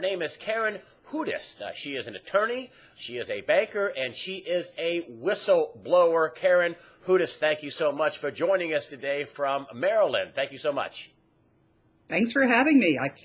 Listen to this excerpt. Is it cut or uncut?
uncut